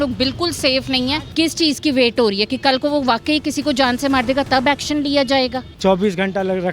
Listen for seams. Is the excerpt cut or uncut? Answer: cut